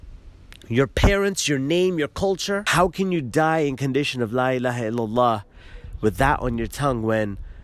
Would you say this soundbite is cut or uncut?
cut